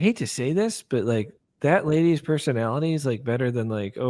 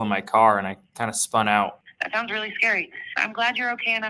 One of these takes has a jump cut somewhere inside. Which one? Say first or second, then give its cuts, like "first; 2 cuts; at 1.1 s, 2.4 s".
second; 1 cut; at 1.9 s